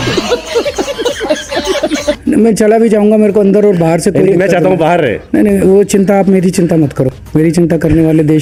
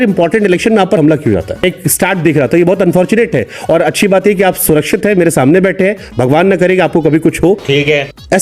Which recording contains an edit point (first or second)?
second